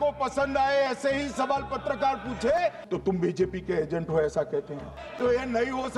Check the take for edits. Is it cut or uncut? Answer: cut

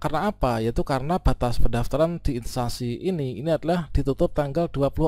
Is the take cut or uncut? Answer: uncut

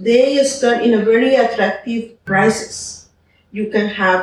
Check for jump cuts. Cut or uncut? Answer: cut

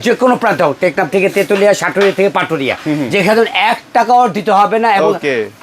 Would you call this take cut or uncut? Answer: uncut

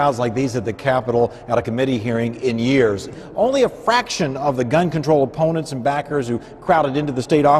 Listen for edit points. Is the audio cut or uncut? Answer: cut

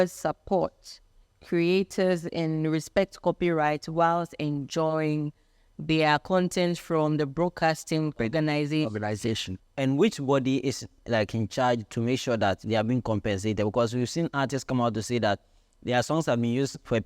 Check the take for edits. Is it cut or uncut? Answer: cut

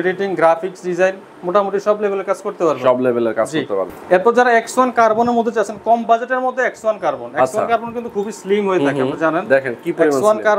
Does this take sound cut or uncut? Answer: cut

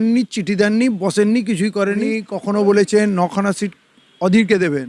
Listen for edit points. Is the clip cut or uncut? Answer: cut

